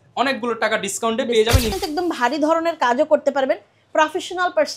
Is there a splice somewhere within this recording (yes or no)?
yes